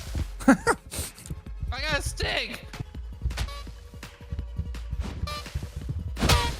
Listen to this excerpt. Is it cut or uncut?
cut